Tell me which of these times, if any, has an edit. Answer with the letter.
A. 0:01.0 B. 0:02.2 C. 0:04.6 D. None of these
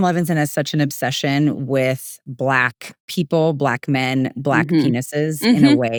D